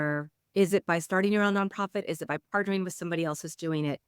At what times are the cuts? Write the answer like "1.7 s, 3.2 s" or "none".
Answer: none